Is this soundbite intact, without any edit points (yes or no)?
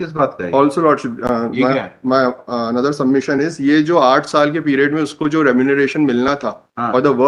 yes